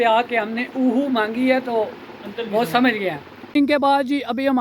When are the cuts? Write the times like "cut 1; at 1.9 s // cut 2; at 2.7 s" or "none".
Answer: cut 1; at 3.3 s